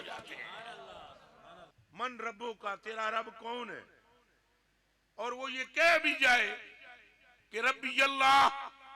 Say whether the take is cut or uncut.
cut